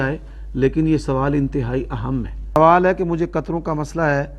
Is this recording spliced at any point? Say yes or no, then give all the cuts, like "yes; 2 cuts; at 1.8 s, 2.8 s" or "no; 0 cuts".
yes; 1 cut; at 2.6 s